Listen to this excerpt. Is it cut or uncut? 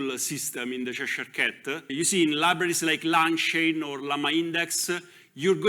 cut